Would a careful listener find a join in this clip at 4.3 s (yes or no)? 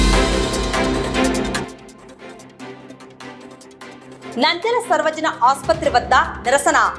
yes